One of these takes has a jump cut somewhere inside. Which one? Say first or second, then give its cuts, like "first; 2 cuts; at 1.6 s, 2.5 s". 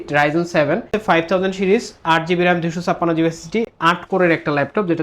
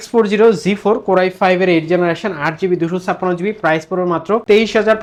first; 1 cut; at 0.9 s